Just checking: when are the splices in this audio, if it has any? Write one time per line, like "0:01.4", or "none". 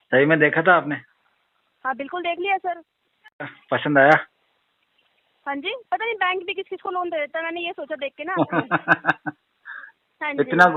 none